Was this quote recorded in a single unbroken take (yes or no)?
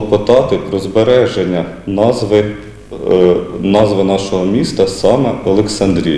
yes